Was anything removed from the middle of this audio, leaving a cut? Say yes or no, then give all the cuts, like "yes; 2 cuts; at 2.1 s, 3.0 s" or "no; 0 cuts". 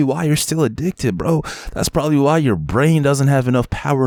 no; 0 cuts